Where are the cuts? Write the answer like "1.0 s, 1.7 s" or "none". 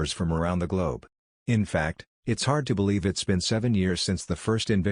1.4 s